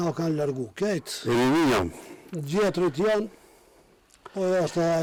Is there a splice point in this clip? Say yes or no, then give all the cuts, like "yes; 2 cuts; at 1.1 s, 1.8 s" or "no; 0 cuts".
no; 0 cuts